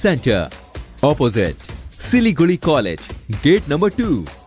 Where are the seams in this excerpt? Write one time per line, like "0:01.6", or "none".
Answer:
none